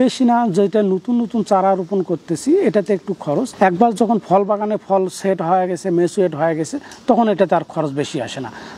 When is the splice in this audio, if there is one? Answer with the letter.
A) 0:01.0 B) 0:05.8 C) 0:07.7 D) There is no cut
D